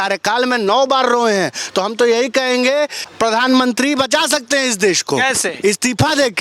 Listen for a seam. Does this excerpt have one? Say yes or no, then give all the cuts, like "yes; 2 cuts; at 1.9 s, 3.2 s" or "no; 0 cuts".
yes; 1 cut; at 3.0 s